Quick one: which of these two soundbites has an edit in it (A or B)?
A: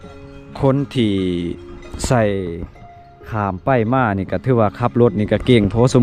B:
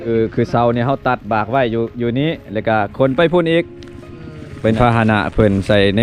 B